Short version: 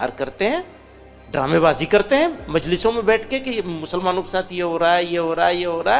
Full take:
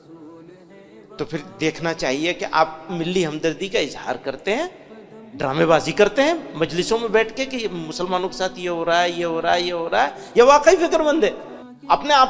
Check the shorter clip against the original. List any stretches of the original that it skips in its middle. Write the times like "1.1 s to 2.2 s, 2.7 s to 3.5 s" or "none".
none

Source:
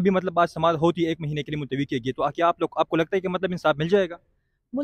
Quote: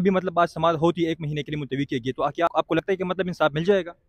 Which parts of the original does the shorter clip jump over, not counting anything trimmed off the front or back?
2.8 s to 3.0 s

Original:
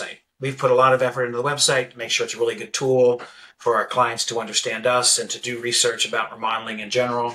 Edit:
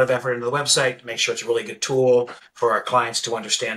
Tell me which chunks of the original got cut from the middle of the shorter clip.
3.3 s to 3.5 s

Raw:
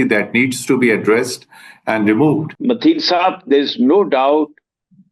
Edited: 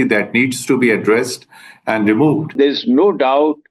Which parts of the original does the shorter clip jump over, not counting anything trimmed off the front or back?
2.5 s to 3.4 s

